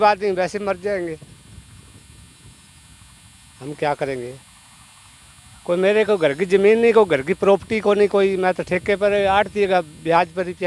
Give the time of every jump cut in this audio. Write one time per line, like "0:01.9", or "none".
none